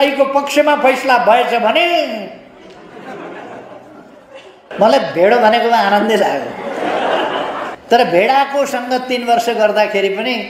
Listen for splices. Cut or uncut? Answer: cut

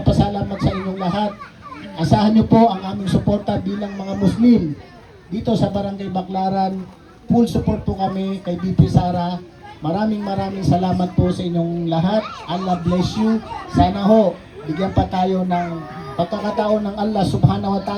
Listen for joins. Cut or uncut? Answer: uncut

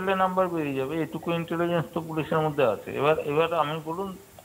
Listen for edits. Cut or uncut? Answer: cut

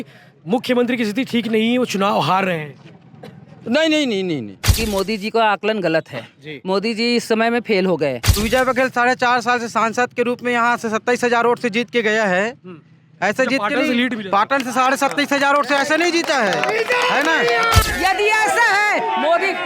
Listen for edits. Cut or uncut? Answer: cut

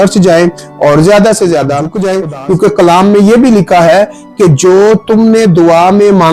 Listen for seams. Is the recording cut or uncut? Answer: cut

